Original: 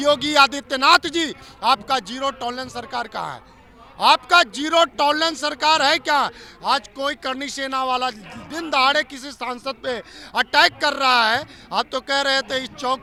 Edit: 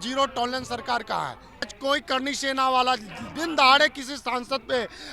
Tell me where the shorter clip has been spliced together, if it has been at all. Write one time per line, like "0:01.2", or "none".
0:01.8